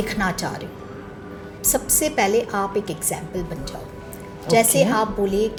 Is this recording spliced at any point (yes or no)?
no